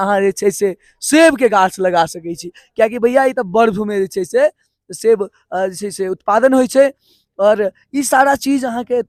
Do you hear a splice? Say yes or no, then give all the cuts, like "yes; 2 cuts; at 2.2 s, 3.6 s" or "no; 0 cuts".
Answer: no; 0 cuts